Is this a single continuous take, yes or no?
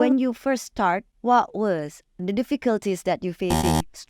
no